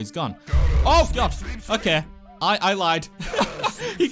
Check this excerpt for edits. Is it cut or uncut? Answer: uncut